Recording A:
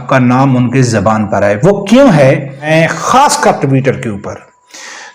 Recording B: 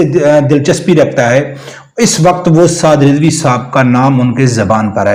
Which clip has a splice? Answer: A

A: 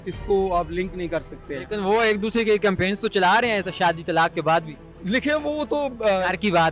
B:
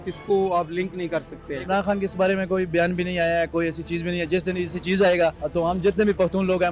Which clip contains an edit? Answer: B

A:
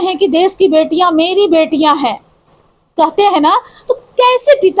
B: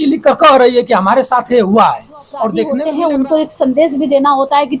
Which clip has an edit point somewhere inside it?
B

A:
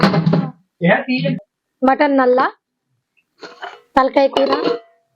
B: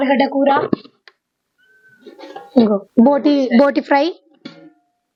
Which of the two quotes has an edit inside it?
A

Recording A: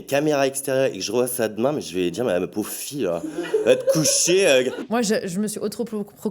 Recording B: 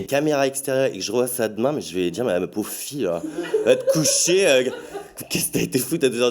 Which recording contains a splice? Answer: A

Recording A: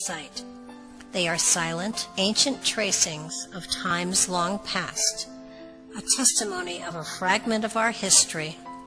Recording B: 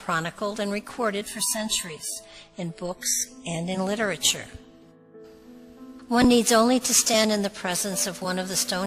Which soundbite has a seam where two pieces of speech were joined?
A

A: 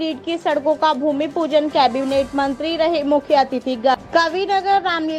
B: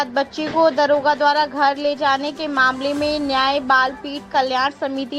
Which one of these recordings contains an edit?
A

